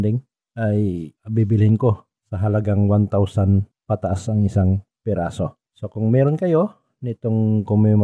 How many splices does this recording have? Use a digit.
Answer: 0